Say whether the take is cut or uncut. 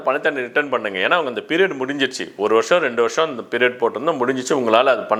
uncut